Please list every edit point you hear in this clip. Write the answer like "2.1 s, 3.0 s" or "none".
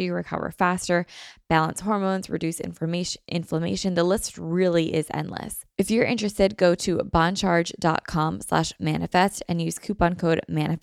5.6 s

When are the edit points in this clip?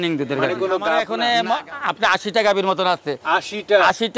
1.1 s

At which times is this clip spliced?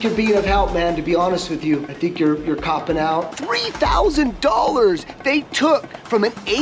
1.9 s, 3.3 s

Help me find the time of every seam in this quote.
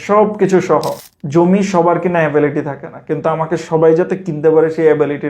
1.0 s

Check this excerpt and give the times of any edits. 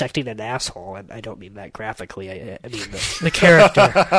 none

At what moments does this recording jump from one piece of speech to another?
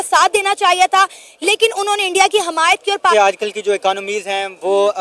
3.1 s

